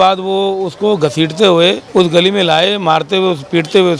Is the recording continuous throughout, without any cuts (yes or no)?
no